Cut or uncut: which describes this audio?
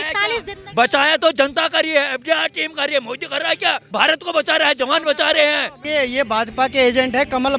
cut